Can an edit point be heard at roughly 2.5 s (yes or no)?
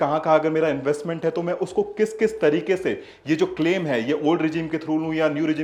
no